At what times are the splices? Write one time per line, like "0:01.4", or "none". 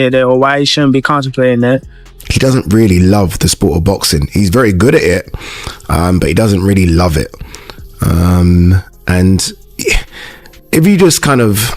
0:02.0

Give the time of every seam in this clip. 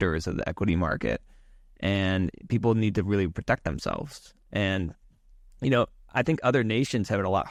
none

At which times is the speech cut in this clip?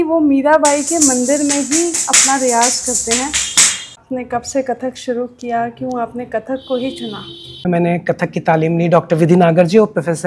0:04.0
0:07.6

